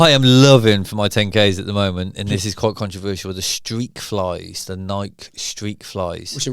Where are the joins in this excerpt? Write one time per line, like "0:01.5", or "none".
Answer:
none

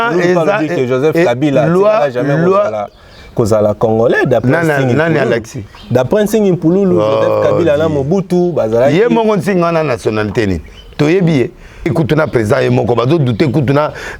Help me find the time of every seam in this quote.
0:11.9

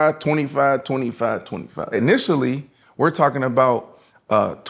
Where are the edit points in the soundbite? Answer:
0:01.9

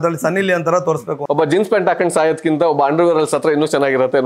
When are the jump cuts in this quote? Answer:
0:01.1

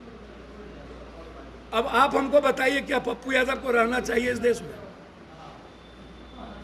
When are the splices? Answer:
none

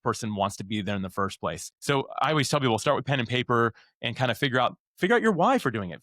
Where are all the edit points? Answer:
0:01.7

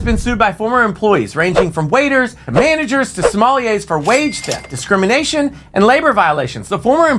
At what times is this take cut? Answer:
none

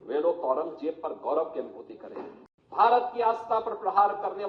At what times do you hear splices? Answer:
0:02.4

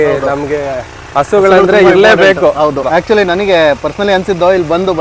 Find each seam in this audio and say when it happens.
0:02.9

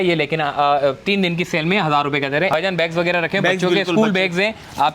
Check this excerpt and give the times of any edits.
0:02.5

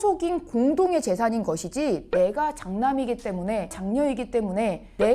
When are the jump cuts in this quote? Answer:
none

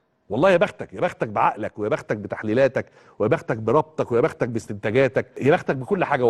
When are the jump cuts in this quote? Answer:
0:05.3

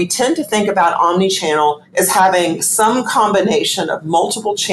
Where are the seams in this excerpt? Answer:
none

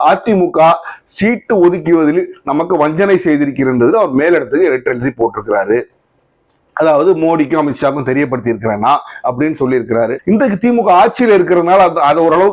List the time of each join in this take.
0:10.2

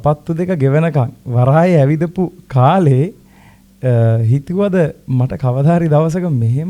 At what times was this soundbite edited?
none

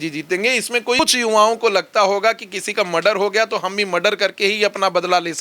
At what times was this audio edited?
0:01.0

